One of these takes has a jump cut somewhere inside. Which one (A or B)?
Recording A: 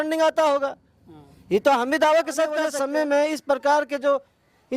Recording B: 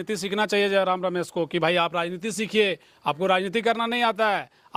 A